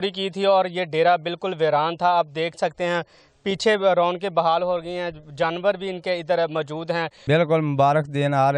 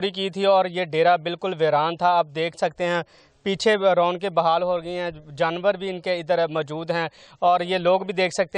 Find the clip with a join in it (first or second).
first